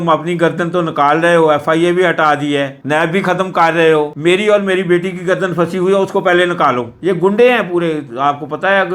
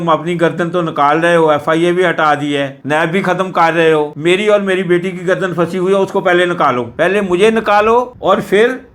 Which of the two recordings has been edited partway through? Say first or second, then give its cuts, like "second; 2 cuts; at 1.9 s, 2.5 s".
first; 1 cut; at 6.9 s